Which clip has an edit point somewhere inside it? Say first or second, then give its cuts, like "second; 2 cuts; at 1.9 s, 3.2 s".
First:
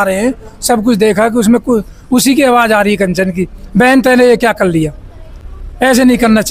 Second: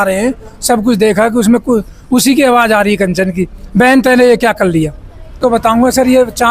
second; 1 cut; at 5.3 s